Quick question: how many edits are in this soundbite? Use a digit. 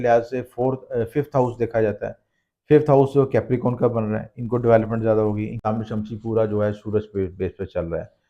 1